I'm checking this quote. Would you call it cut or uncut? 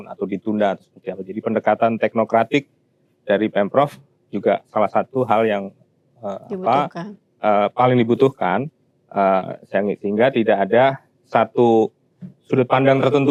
uncut